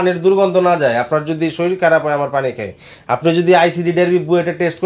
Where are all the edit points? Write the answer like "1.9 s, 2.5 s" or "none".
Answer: none